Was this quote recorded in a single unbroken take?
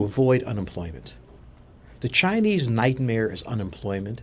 yes; 0 cuts

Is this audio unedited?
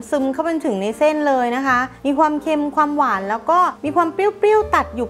no; 2 cuts; at 1.9 s, 3.8 s

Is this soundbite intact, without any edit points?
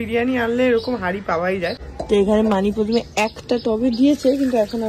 no; 1 cut; at 1.9 s

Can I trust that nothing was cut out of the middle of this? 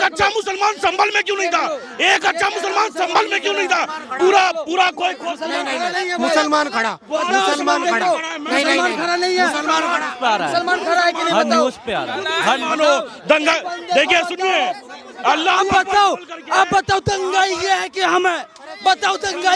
yes; 0 cuts

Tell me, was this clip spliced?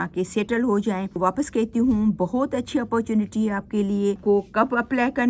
yes; 2 cuts; at 1.2 s, 4.2 s

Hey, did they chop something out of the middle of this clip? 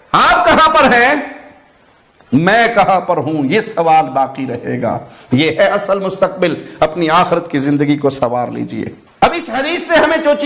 no; 0 cuts

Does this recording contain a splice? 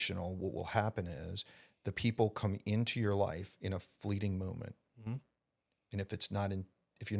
no; 0 cuts

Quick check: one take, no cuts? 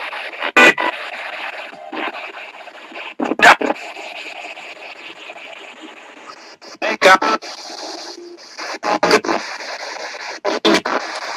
yes; 0 cuts

